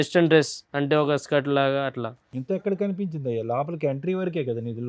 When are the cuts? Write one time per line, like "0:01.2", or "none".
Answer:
none